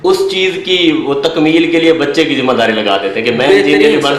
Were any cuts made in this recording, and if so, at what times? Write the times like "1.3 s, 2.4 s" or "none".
none

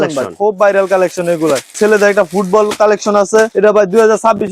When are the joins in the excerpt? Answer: 1.7 s

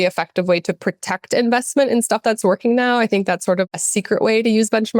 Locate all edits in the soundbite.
3.7 s

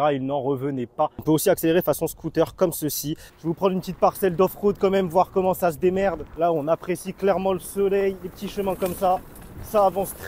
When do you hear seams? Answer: 1.2 s, 3.2 s, 6.3 s

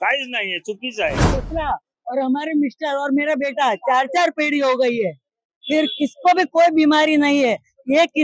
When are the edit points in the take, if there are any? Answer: 1.4 s

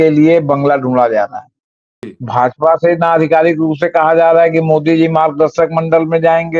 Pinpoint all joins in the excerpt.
2.1 s

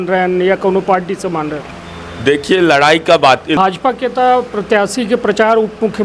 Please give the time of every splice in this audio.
3.6 s

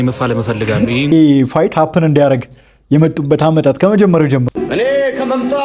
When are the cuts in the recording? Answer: 1.1 s, 4.4 s

